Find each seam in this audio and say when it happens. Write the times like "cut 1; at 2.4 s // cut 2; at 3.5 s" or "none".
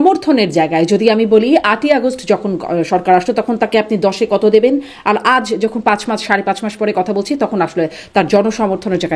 none